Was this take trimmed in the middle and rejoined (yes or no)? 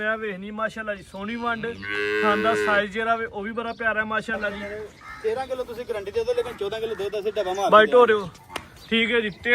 yes